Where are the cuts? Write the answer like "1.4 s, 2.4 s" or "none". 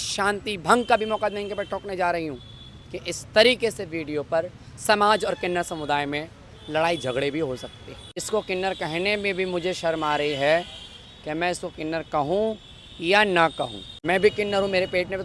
8.2 s, 13.9 s